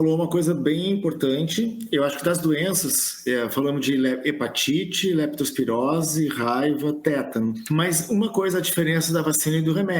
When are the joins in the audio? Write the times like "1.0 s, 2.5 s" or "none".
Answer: 7.6 s